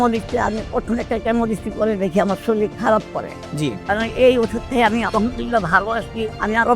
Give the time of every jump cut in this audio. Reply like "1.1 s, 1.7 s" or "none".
3.8 s